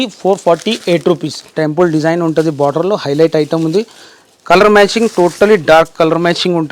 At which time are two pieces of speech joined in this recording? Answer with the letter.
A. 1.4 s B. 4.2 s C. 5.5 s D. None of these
A